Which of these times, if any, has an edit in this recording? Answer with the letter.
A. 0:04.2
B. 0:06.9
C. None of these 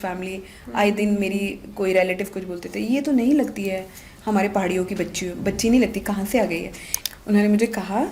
B